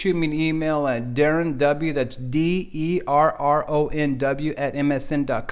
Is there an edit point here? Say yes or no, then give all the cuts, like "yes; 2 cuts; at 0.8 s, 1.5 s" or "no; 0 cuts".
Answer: no; 0 cuts